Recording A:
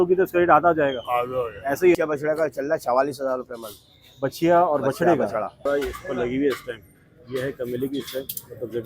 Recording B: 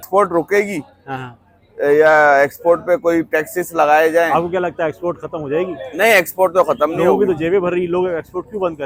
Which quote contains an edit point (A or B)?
A